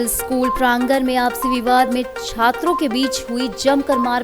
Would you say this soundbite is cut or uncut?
uncut